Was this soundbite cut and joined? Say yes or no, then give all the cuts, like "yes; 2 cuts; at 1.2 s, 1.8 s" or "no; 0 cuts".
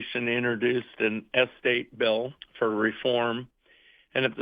yes; 1 cut; at 2.4 s